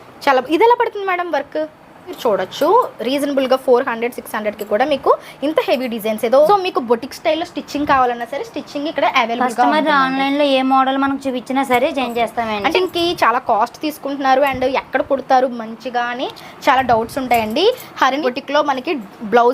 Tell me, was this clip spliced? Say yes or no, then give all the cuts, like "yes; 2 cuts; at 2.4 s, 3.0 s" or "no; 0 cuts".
yes; 4 cuts; at 2.2 s, 6.5 s, 12.7 s, 18.2 s